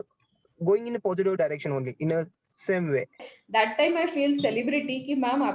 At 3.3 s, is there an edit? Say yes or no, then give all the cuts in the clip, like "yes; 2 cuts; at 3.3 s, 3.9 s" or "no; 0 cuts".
yes; 1 cut; at 3.3 s